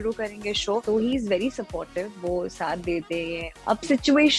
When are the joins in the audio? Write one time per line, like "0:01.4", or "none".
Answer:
0:00.8
0:03.5